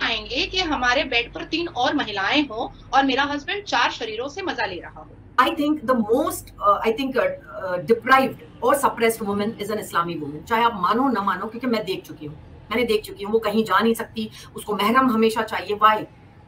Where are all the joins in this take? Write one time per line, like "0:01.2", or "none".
0:05.2